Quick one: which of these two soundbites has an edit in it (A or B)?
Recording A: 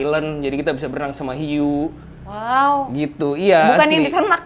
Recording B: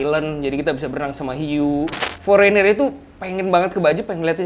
B